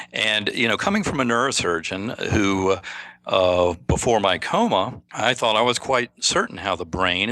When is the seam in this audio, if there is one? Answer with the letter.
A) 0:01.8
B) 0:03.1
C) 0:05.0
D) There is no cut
C